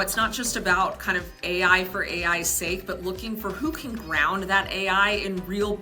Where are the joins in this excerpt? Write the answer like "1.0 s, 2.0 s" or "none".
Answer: none